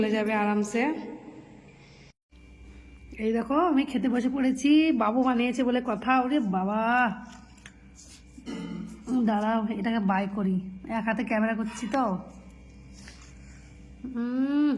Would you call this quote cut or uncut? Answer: cut